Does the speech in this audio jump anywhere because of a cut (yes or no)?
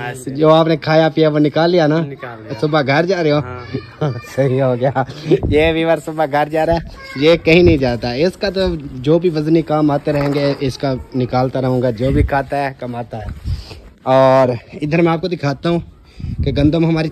no